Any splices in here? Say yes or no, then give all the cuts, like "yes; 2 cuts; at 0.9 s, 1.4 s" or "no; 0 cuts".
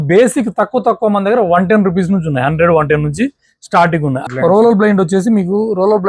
yes; 1 cut; at 4.2 s